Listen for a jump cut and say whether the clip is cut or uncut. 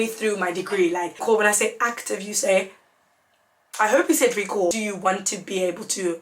cut